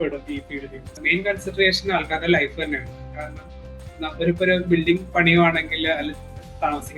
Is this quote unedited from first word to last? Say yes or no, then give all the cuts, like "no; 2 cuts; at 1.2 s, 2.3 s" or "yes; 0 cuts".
no; 2 cuts; at 1.0 s, 5.1 s